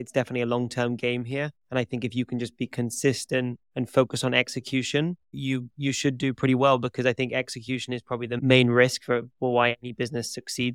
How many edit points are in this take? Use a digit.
2